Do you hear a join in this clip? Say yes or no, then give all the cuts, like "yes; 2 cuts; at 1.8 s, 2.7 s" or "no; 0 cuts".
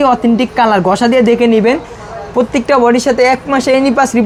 no; 0 cuts